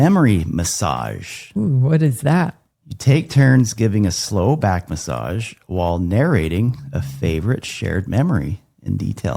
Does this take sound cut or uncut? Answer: uncut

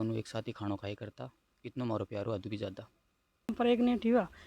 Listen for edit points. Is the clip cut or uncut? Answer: cut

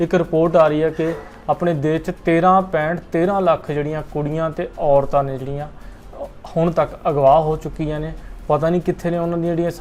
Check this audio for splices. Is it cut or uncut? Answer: uncut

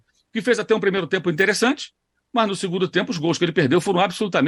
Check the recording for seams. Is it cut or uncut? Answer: uncut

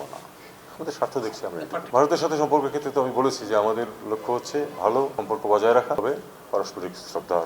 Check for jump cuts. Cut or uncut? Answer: cut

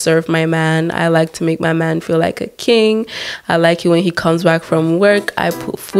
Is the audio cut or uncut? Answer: uncut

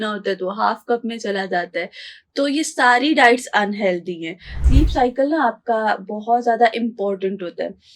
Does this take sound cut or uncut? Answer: cut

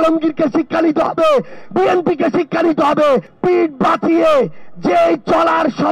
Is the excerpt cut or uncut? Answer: cut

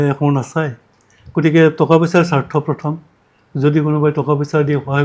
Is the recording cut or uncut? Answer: uncut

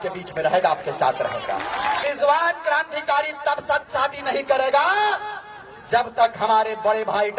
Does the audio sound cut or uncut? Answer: cut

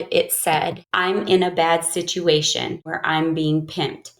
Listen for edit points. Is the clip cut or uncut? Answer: cut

